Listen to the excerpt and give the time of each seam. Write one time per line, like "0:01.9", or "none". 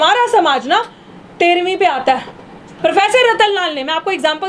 0:02.7